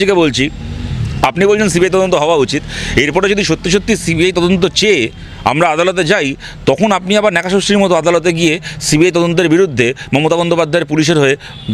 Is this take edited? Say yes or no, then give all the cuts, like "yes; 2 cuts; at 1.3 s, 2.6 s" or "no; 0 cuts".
no; 0 cuts